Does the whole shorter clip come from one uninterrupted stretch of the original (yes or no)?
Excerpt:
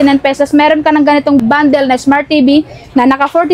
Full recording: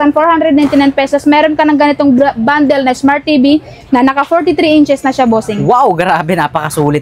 no